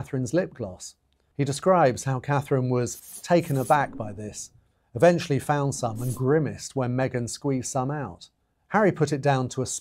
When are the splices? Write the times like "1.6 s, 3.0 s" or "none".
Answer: none